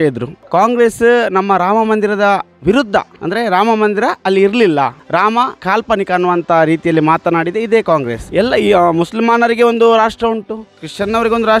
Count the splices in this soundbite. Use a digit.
1